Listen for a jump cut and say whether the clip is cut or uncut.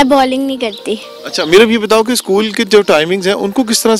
uncut